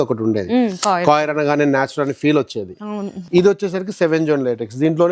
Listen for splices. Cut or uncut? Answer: cut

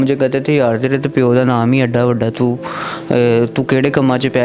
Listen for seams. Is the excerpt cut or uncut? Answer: uncut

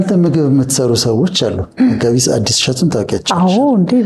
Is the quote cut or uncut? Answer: uncut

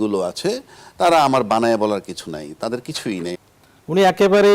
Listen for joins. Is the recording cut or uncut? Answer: cut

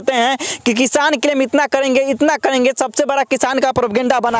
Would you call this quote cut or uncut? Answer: uncut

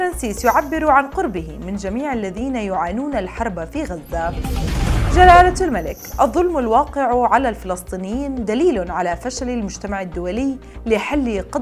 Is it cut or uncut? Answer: uncut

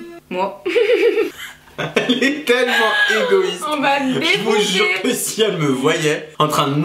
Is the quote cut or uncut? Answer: uncut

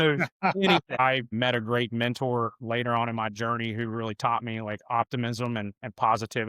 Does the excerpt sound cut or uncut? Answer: cut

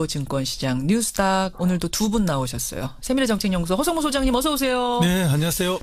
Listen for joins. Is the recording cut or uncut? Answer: uncut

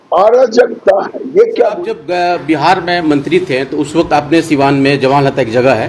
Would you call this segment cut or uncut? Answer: cut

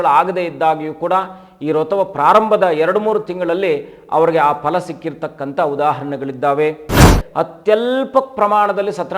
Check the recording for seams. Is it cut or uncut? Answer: cut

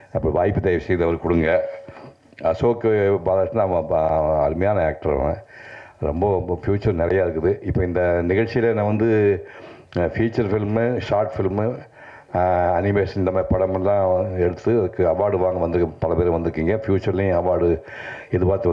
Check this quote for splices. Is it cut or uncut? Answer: uncut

